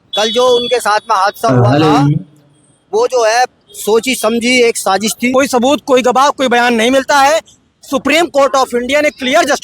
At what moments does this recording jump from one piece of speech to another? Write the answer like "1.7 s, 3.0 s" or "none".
5.3 s